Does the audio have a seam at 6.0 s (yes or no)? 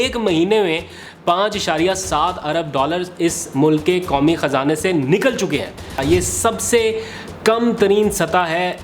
yes